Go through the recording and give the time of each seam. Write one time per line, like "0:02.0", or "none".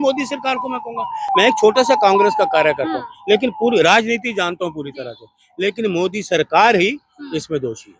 none

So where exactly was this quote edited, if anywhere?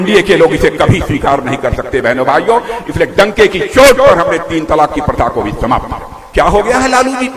0:06.1

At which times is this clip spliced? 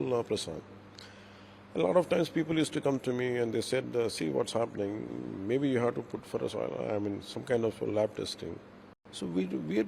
none

